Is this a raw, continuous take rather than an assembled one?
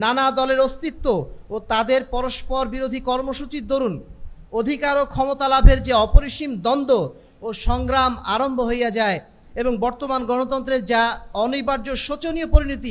yes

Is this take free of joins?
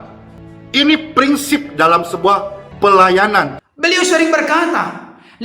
no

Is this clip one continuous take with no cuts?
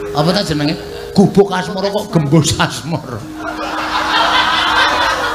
yes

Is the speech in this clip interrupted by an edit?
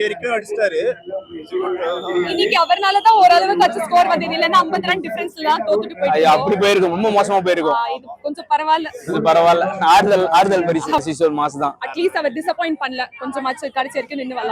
yes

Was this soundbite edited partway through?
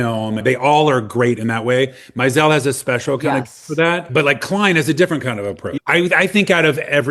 yes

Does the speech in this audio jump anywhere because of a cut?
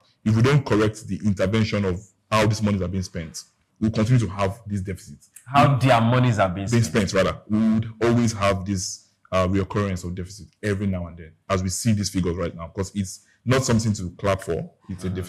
yes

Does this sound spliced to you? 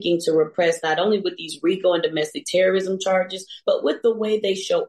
no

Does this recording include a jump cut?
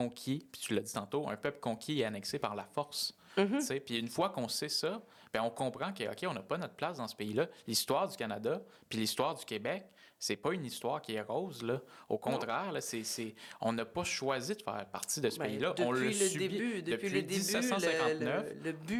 no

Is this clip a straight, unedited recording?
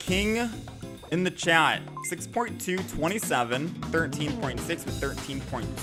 yes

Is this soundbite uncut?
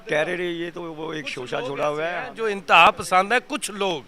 yes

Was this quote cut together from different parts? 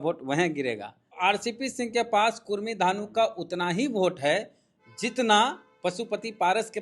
yes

